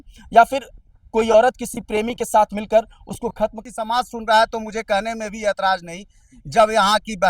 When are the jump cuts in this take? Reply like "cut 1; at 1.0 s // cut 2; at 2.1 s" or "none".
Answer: cut 1; at 3.6 s